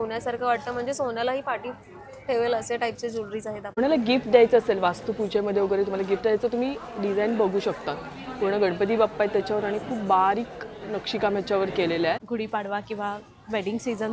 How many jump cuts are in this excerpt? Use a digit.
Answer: 2